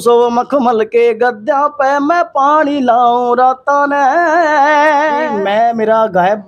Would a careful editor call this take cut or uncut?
cut